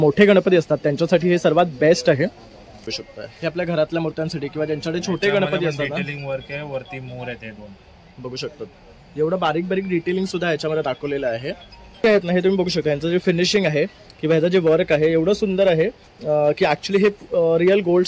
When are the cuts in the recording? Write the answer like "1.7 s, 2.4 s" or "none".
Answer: 3.0 s, 12.0 s